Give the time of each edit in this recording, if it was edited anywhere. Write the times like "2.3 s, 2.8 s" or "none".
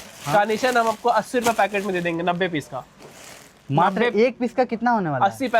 none